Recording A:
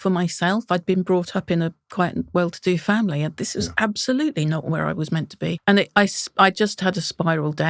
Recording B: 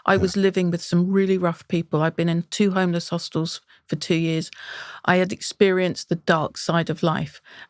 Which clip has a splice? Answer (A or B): A